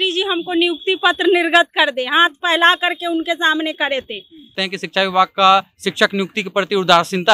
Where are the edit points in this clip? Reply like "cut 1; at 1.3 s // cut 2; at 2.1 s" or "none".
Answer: cut 1; at 4.5 s

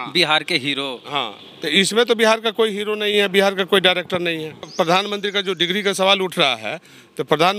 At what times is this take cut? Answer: cut 1; at 4.6 s

